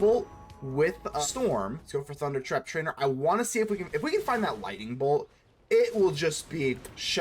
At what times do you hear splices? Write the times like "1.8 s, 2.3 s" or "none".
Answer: 1.2 s, 1.8 s